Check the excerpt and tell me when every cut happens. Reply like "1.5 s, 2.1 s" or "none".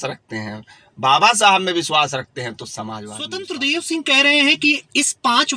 3.5 s